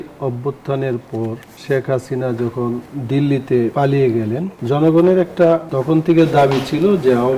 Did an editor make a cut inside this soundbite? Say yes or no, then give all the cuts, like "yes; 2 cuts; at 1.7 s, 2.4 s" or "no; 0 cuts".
yes; 5 cuts; at 1.5 s, 2.9 s, 3.7 s, 4.5 s, 5.7 s